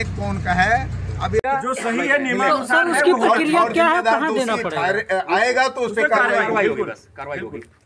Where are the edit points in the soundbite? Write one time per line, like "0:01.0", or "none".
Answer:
0:01.4